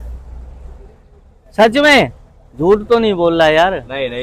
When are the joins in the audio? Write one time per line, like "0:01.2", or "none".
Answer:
none